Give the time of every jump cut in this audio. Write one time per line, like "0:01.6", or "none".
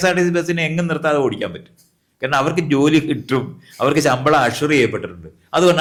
none